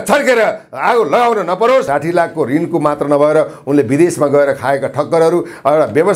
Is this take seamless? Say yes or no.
no